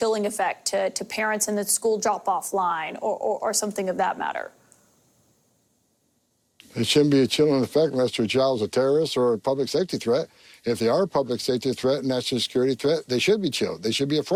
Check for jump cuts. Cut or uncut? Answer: uncut